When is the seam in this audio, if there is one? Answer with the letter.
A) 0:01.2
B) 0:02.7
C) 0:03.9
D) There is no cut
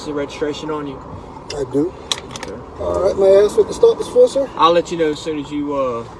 B